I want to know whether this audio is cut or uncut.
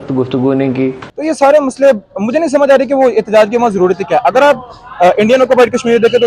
cut